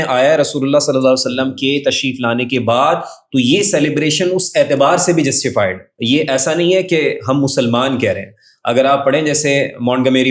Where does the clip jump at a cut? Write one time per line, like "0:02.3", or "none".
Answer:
0:05.9